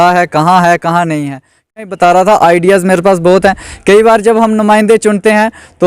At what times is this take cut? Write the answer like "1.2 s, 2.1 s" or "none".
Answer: 1.9 s